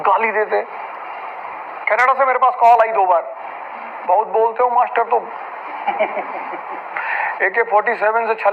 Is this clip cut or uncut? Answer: uncut